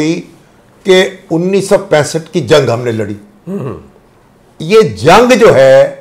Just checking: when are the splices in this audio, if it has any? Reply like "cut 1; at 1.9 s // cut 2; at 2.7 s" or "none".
none